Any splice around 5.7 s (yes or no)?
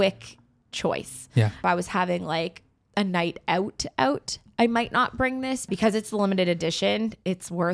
yes